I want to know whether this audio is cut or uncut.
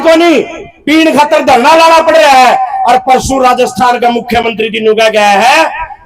uncut